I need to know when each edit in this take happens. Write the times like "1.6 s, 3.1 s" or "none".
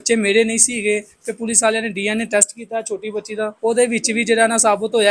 3.5 s